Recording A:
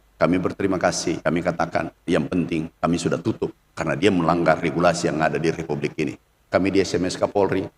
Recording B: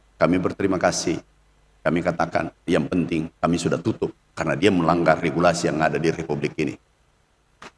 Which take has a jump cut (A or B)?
A